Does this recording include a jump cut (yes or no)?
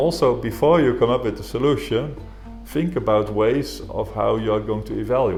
no